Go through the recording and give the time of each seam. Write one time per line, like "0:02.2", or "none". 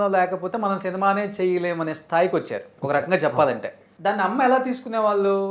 none